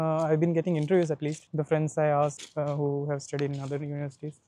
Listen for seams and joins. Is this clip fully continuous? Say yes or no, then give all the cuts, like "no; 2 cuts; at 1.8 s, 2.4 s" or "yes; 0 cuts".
yes; 0 cuts